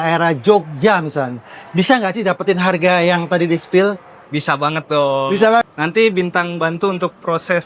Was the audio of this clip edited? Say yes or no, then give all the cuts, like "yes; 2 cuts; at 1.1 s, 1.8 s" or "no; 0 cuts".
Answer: yes; 2 cuts; at 4.1 s, 5.7 s